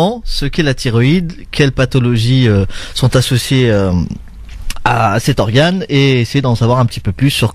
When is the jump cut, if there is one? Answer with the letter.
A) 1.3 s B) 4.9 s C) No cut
C